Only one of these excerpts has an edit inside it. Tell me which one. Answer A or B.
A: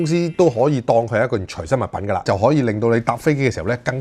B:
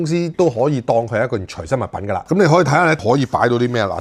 A